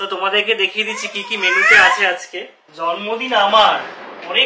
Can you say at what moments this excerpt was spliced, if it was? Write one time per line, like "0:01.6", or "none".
0:02.6